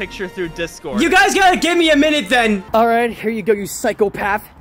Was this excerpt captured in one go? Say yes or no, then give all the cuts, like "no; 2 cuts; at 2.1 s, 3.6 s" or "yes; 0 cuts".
no; 2 cuts; at 0.9 s, 2.6 s